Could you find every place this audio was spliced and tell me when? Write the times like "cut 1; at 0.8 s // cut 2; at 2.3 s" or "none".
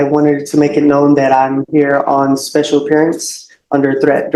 none